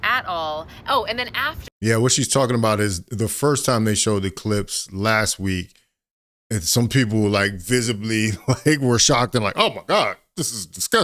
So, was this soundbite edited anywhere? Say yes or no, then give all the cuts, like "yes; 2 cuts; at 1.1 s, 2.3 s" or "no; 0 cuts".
no; 0 cuts